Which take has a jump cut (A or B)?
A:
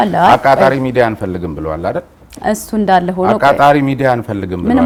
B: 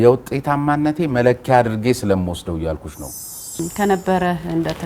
B